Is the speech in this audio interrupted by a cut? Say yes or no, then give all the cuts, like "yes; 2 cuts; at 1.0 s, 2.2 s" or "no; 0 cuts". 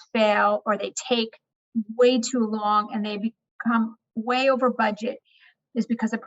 no; 0 cuts